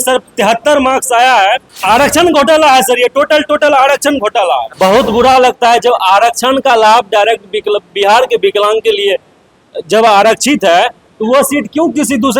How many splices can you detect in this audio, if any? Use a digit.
2